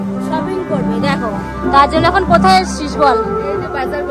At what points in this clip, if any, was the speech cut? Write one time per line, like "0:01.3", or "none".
none